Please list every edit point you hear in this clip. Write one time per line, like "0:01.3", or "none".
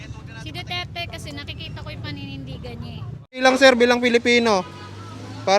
0:03.4